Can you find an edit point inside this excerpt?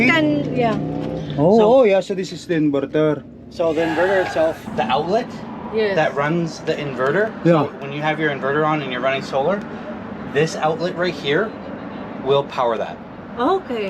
yes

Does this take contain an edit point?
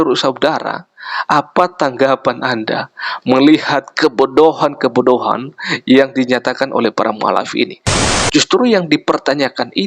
yes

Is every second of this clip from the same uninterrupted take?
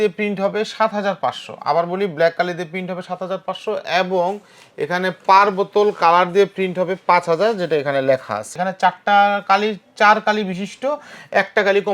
no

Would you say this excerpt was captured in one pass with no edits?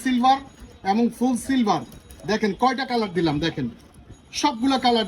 yes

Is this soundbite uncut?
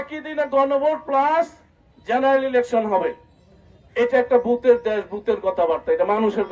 yes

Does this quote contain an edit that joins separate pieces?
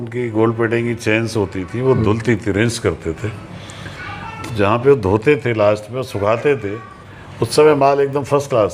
no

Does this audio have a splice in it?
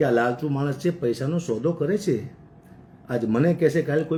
no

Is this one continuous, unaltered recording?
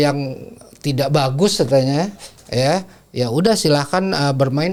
yes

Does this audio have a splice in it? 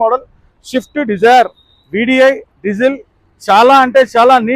no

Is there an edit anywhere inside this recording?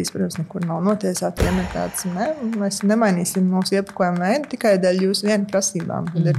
yes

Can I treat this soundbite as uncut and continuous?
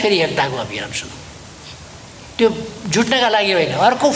yes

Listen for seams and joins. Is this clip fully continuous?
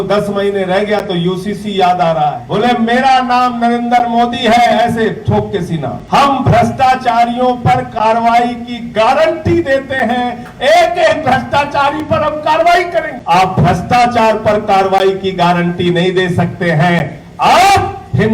no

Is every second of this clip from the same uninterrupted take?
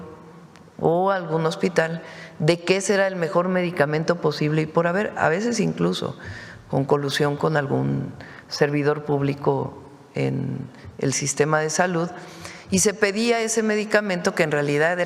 yes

